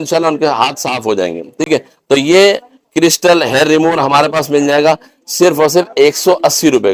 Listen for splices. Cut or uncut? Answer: uncut